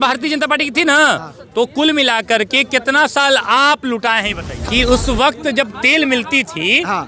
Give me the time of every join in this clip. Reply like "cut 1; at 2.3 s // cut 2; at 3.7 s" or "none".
cut 1; at 4.5 s